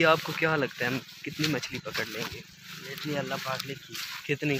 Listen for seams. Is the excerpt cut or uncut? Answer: uncut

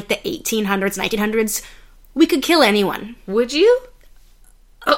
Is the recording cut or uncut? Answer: uncut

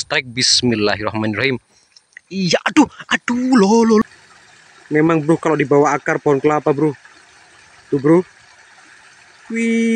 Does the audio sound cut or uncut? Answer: cut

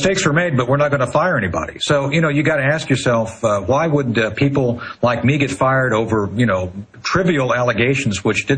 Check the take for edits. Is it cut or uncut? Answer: cut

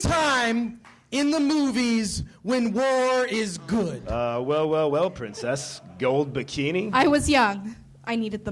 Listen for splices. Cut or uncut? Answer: cut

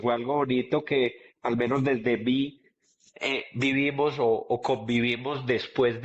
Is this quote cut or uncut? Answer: uncut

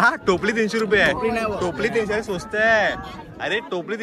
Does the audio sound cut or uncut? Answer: uncut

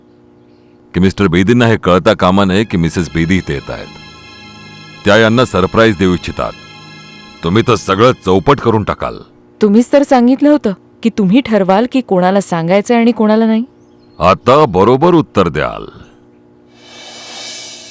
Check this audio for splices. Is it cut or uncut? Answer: cut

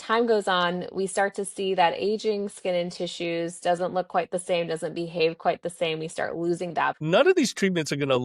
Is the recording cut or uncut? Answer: cut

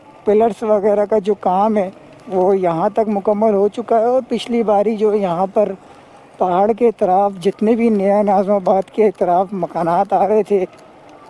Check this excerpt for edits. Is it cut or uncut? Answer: uncut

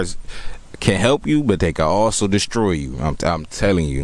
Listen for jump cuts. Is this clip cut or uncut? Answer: uncut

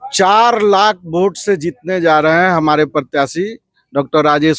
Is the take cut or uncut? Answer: uncut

